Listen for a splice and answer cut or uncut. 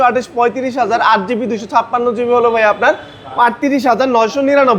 uncut